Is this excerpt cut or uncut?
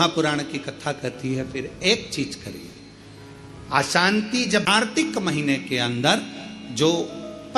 cut